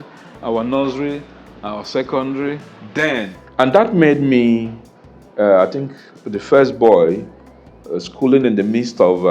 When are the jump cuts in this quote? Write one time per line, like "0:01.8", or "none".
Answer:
0:03.4